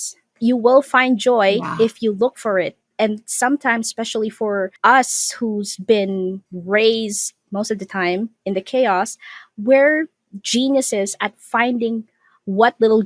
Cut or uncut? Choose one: cut